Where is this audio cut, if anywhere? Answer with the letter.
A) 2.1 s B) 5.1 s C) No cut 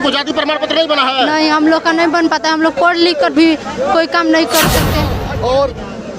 B